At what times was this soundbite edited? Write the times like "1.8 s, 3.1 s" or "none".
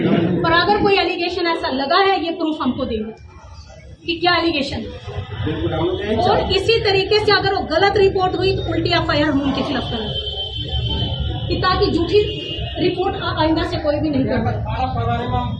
none